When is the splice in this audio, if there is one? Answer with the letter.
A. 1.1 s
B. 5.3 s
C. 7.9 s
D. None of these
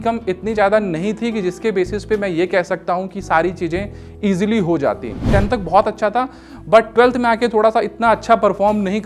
B